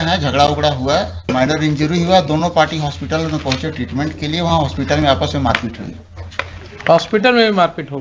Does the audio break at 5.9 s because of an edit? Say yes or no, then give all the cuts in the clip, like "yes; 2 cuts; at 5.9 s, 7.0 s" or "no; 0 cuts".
no; 1 cut; at 1.2 s